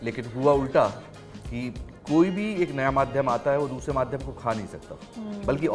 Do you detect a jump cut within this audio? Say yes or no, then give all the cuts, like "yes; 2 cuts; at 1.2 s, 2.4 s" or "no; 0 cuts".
no; 0 cuts